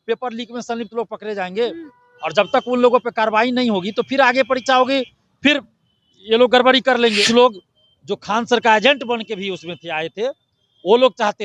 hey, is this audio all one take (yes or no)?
no